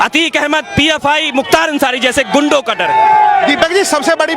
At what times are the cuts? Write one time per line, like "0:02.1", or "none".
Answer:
none